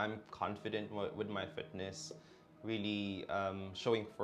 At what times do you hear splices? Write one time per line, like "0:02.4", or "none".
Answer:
none